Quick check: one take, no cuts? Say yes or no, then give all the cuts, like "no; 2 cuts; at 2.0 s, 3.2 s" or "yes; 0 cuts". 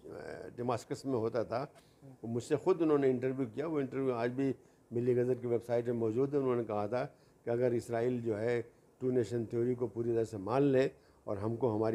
yes; 0 cuts